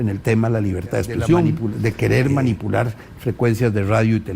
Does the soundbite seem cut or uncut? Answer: cut